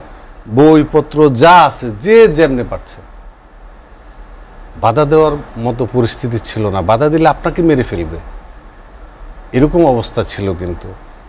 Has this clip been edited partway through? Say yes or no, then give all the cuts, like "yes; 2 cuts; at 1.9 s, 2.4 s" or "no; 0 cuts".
no; 0 cuts